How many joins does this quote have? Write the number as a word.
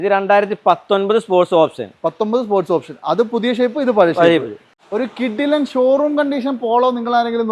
one